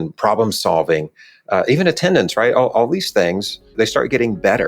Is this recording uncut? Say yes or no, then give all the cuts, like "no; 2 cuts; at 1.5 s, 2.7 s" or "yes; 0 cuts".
no; 1 cut; at 3.7 s